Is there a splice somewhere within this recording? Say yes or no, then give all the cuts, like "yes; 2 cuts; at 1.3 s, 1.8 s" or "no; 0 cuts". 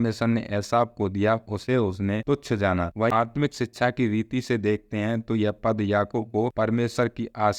yes; 1 cut; at 3.1 s